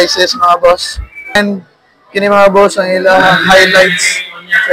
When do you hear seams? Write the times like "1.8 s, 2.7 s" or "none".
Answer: 1.4 s